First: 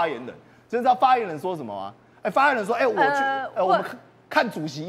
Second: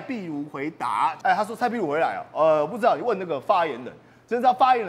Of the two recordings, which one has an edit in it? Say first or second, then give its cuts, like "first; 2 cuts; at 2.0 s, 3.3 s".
second; 1 cut; at 1.2 s